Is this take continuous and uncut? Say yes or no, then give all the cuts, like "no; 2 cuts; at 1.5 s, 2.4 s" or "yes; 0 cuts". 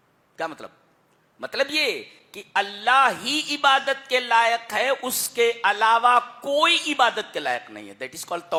yes; 0 cuts